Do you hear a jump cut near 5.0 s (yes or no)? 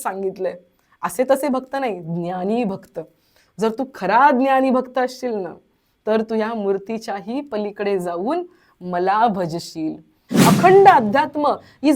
no